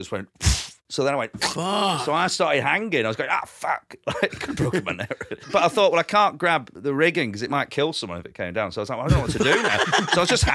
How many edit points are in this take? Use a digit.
3